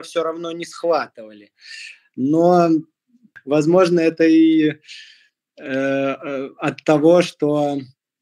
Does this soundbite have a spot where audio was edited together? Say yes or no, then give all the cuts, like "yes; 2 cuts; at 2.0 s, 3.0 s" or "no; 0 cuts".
no; 0 cuts